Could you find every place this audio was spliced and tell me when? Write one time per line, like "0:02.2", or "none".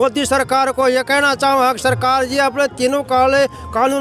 none